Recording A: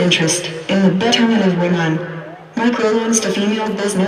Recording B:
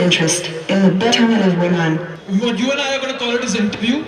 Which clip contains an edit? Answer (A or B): B